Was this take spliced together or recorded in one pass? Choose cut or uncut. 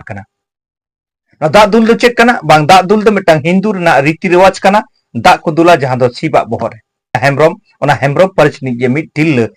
cut